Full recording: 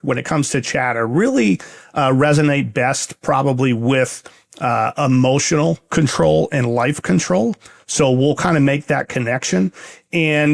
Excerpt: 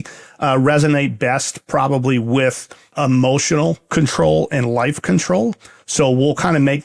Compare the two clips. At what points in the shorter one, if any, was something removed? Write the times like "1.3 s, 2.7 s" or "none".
2.9 s